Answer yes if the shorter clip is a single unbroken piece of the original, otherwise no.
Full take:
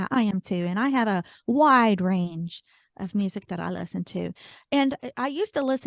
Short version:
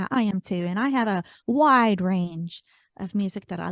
yes